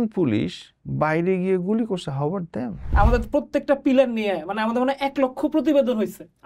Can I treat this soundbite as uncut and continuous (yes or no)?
no